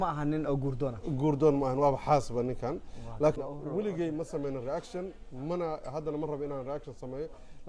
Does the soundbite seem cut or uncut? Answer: cut